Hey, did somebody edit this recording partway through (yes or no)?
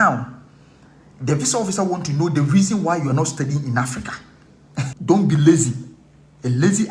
yes